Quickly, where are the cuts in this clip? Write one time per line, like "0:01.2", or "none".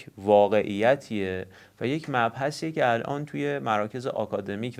none